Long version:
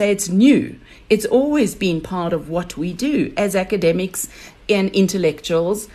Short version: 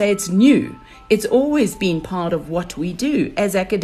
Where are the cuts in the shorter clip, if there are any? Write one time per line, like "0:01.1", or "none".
none